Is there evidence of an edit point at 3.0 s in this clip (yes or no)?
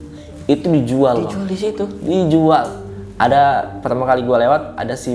yes